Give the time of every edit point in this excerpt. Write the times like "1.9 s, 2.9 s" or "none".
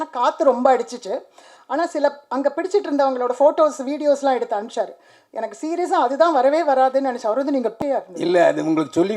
7.8 s

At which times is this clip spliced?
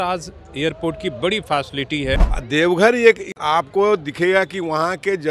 2.4 s, 3.3 s

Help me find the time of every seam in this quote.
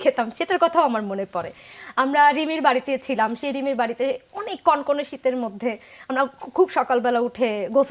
none

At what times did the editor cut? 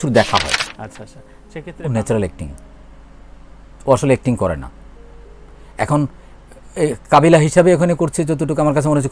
1.1 s

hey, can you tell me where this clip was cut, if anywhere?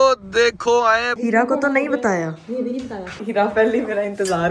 1.1 s, 3.2 s

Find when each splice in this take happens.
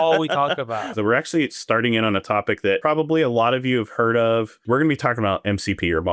0.9 s, 2.8 s, 4.6 s

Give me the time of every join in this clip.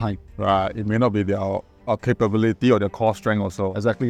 none

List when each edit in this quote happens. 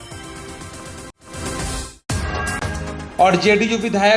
1.1 s

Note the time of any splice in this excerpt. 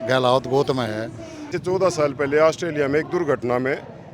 1.5 s

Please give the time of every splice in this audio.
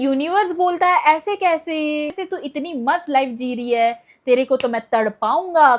none

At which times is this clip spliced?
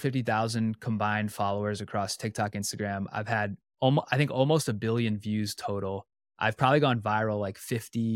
none

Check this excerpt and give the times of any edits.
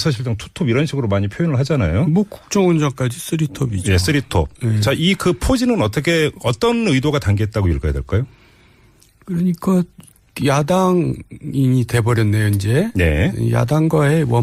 2.2 s

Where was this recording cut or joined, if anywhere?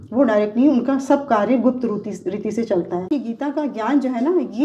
3.1 s

